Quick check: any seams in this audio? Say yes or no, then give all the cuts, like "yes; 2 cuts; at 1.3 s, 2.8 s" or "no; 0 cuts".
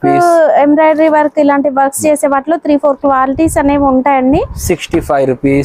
no; 0 cuts